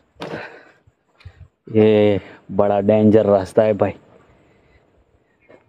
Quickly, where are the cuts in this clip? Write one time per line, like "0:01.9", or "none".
none